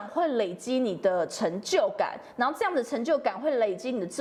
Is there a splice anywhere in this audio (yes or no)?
no